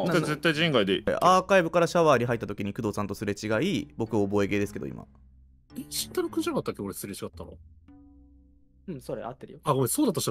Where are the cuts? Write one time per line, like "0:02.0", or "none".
0:01.0